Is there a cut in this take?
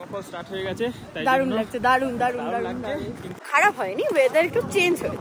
yes; 1 cut; at 3.3 s

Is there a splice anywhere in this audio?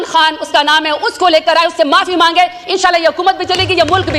no; 0 cuts

